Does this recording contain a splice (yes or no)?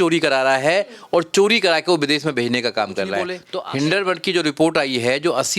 yes